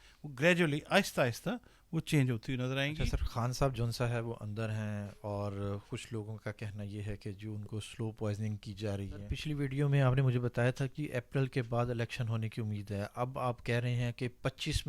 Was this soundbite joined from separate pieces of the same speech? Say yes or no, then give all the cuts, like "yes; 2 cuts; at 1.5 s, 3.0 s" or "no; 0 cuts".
yes; 2 cuts; at 3.0 s, 9.2 s